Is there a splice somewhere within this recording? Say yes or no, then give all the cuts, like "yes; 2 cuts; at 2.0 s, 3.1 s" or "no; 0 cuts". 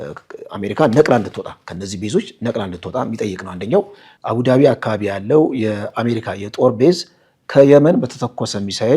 yes; 1 cut; at 4.2 s